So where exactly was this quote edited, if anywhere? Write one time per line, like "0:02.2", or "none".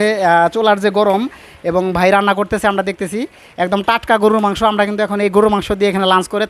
none

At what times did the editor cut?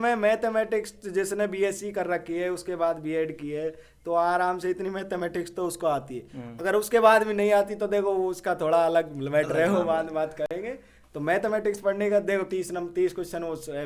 none

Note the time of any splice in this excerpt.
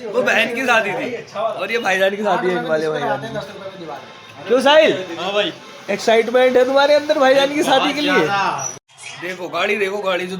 0:08.7

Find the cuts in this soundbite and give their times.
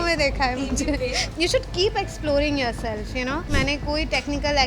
0:01.3
0:03.5

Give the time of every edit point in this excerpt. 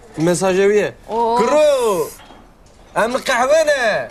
none

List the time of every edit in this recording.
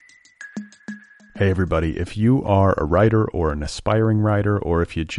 0:00.9

